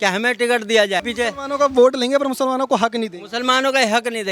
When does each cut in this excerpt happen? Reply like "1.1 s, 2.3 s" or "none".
1.1 s